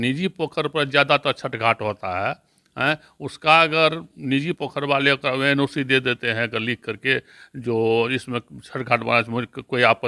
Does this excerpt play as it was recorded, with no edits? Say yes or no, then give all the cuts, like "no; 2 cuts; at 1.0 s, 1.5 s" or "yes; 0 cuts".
yes; 0 cuts